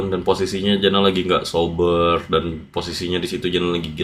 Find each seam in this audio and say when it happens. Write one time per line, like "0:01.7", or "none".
none